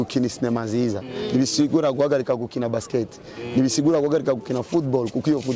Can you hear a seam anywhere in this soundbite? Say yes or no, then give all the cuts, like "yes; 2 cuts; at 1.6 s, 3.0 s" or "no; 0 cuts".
no; 0 cuts